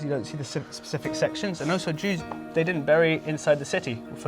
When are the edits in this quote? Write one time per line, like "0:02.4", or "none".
none